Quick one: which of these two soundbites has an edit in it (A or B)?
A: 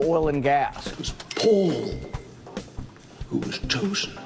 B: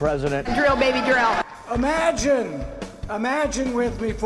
A